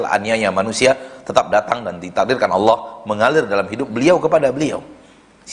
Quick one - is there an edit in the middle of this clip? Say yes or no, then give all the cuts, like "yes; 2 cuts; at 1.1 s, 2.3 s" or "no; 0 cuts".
no; 0 cuts